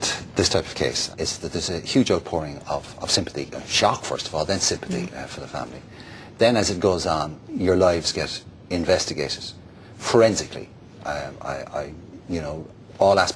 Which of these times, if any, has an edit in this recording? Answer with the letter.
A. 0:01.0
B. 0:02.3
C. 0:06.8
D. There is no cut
A